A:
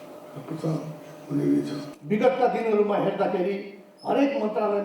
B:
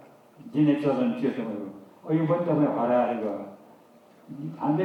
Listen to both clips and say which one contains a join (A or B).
A